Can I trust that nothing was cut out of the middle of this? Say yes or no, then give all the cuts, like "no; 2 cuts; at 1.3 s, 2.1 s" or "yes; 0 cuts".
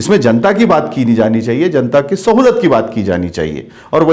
yes; 0 cuts